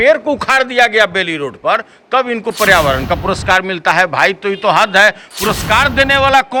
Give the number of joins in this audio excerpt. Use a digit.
0